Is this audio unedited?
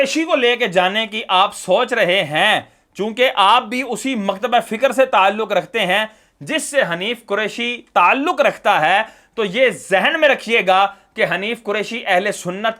yes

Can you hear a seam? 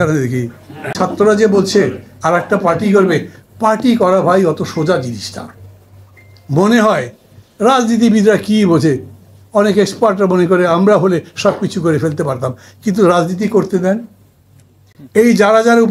yes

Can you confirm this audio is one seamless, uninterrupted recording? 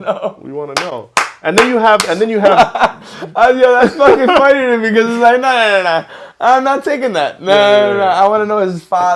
yes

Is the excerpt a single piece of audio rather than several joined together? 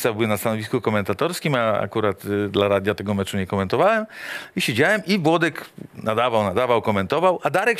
yes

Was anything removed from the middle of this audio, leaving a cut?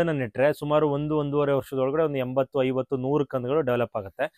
no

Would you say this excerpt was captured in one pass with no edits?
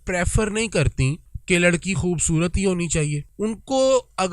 no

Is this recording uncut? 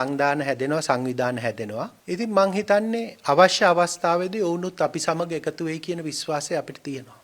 no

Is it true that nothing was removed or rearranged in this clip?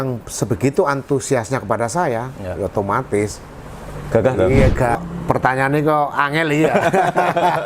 no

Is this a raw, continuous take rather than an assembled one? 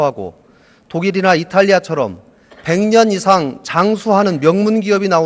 no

